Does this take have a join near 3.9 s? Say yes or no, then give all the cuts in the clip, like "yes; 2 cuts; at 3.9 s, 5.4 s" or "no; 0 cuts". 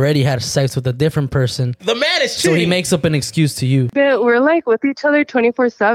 yes; 2 cuts; at 1.8 s, 3.9 s